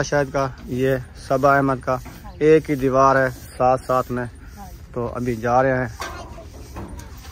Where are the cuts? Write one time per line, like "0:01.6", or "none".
none